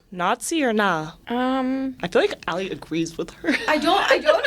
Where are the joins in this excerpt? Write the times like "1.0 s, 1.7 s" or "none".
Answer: 1.1 s

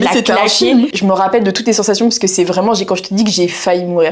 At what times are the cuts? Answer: 0.9 s

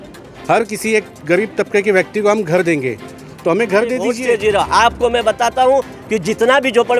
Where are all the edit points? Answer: 4.1 s

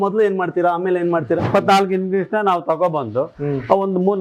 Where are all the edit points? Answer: 1.4 s

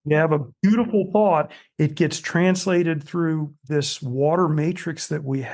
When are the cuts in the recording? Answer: none

